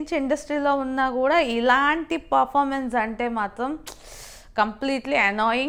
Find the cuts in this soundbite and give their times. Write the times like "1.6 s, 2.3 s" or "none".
none